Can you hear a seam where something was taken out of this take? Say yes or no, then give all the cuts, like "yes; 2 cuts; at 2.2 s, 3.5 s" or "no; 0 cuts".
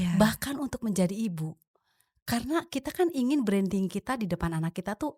no; 0 cuts